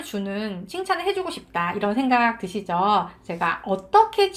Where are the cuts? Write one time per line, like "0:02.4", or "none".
none